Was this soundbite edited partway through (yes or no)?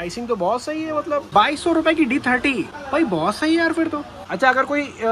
yes